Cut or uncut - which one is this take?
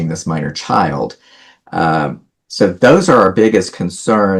uncut